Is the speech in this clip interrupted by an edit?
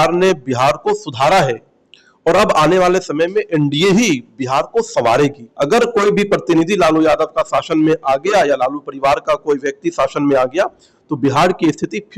yes; 1 cut; at 5.5 s

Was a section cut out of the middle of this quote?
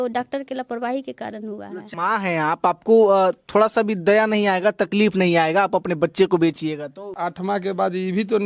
yes; 2 cuts; at 1.9 s, 7.1 s

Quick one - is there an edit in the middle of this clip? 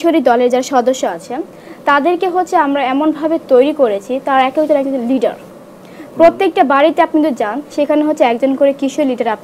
no; 0 cuts

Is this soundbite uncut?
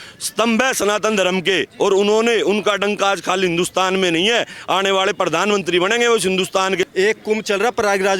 no; 1 cut; at 6.9 s

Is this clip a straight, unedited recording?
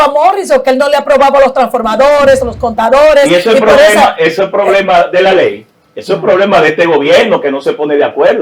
yes; 0 cuts

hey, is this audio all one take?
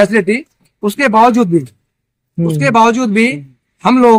yes; 0 cuts

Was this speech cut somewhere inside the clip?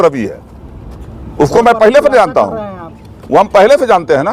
no; 0 cuts

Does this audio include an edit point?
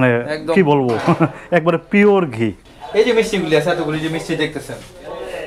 yes; 1 cut; at 2.6 s

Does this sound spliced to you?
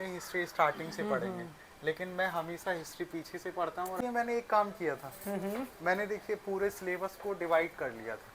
yes; 1 cut; at 4.0 s

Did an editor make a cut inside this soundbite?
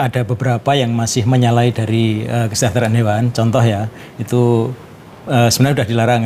no; 0 cuts

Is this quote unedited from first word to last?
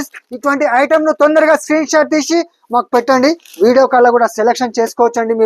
yes; 0 cuts

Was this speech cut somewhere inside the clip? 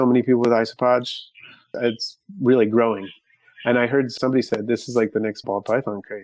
yes; 3 cuts; at 1.7 s, 4.1 s, 5.4 s

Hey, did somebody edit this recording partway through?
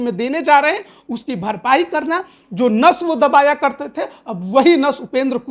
no; 0 cuts

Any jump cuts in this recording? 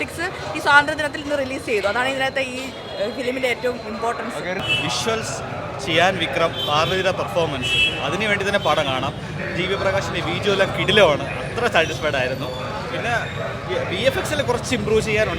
no; 0 cuts

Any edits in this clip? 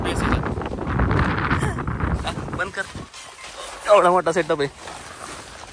no; 0 cuts

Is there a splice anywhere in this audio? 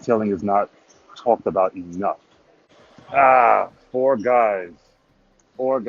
yes; 1 cut; at 2.7 s

